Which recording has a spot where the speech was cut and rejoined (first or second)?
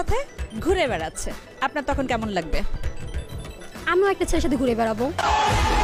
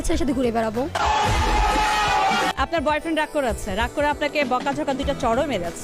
second